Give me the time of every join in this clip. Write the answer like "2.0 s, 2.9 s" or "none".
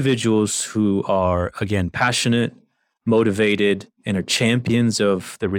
none